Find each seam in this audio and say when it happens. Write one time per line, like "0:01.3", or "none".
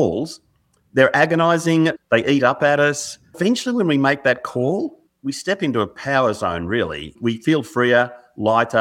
0:02.0
0:03.3
0:05.1
0:07.1

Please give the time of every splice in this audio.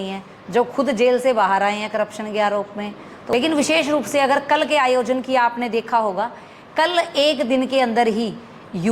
0:03.3

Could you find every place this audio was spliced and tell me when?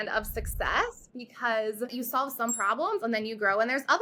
none

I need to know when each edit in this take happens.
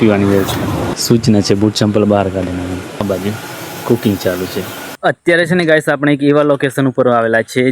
0:00.9
0:03.0
0:04.9

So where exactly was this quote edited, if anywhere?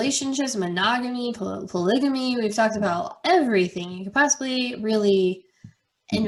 none

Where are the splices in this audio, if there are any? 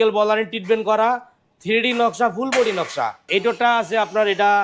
0:03.2

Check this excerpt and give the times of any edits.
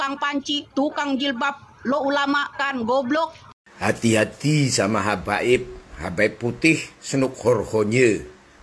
0:03.6

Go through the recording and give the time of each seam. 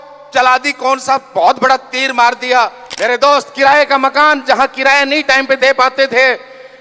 0:02.8

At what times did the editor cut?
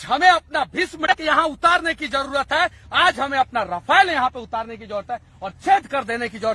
0:01.1

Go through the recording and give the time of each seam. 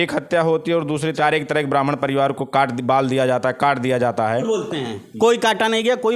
0:01.2
0:04.4

